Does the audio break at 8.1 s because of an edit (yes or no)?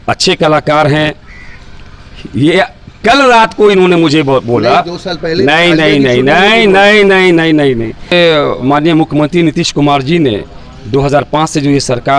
yes